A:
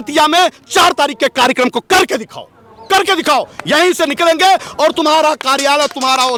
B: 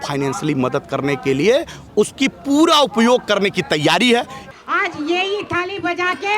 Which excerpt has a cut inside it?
B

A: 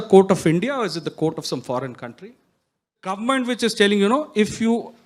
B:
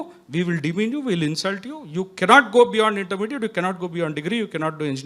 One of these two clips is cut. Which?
A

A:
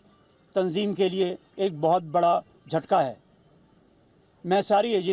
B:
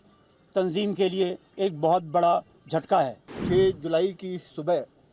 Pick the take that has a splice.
B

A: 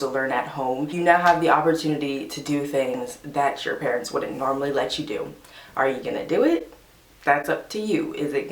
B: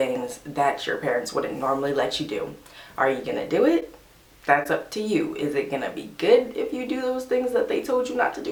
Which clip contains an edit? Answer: A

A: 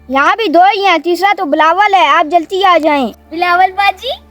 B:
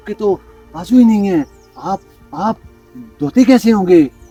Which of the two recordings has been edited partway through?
A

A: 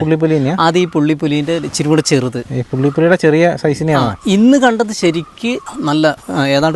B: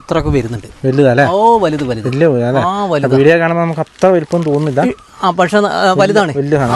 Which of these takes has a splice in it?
A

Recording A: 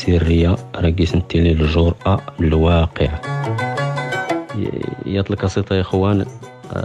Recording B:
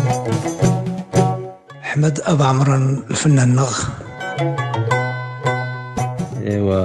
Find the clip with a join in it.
B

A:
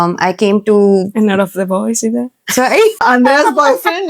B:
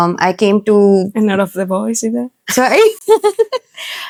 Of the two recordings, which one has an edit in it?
A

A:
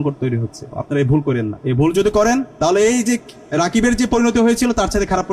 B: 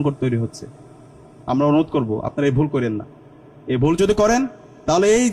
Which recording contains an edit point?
A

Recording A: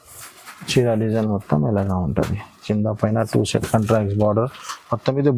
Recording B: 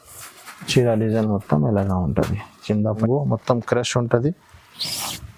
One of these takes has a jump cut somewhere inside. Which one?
B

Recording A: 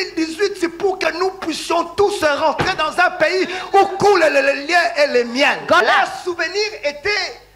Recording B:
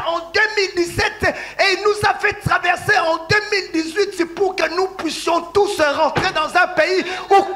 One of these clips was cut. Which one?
A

